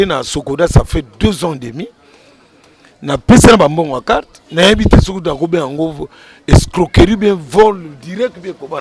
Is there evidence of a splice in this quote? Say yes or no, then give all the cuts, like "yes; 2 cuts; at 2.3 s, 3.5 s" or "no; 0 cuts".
no; 0 cuts